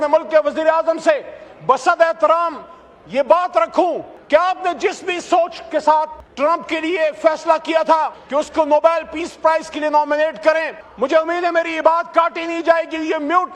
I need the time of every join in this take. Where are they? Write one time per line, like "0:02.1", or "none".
0:04.1
0:06.2
0:08.2
0:10.8